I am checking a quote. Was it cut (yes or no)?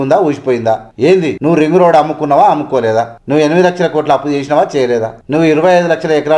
yes